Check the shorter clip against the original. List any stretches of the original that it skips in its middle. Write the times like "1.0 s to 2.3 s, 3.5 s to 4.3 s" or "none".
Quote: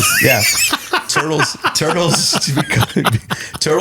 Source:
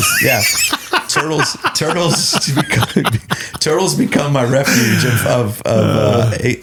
none